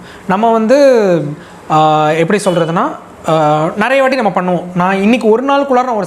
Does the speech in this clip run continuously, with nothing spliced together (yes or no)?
yes